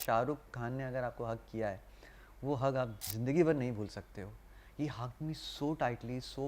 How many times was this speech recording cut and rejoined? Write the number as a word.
one